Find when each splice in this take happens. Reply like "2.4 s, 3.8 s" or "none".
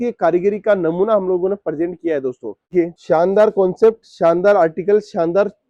2.7 s

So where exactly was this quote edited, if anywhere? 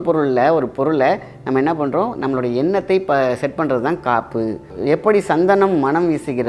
4.7 s

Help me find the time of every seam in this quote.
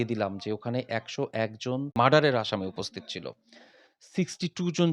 1.9 s

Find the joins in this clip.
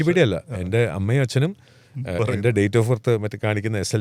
none

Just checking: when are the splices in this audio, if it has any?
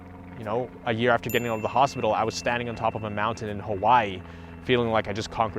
none

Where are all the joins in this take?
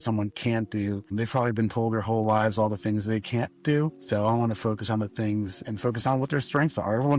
1.1 s, 4.0 s, 5.6 s

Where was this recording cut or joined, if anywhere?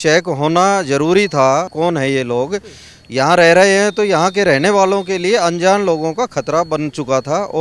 1.7 s

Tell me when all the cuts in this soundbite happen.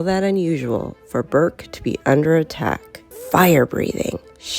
3.1 s

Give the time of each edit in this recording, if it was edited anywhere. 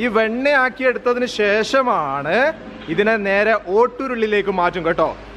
none

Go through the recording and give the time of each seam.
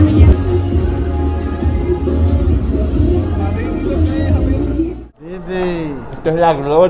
5.1 s

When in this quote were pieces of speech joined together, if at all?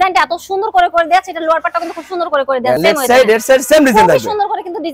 none

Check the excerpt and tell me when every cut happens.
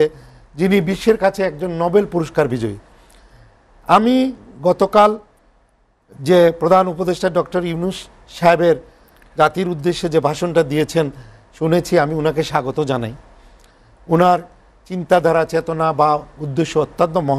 none

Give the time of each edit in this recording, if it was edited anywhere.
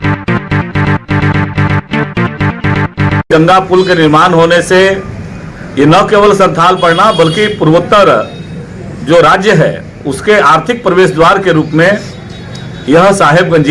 3.3 s

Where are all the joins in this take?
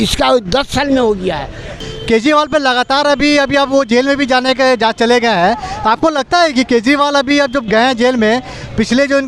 1.8 s

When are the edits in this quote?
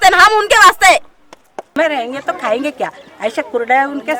1.7 s

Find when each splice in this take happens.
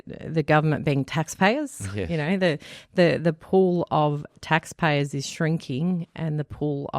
none

